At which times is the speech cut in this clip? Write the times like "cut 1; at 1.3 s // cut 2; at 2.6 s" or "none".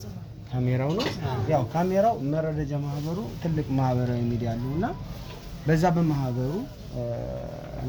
none